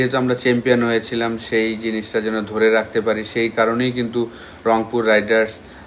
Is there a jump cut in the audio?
no; 0 cuts

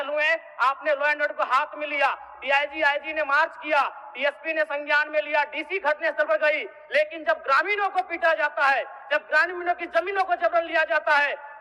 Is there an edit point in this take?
no; 0 cuts

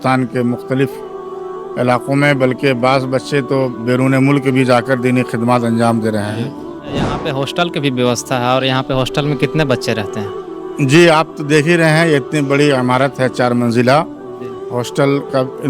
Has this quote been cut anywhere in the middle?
no; 0 cuts

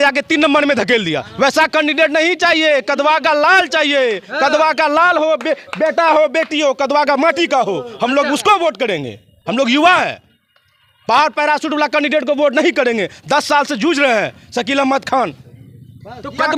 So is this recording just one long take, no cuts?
yes; 0 cuts

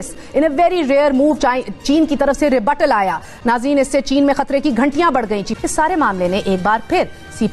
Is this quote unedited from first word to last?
no; 2 cuts; at 3.3 s, 5.6 s

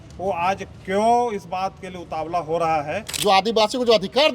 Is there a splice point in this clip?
yes; 1 cut; at 3.1 s

